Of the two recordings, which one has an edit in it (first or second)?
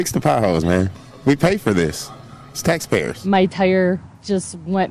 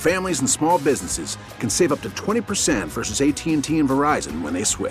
first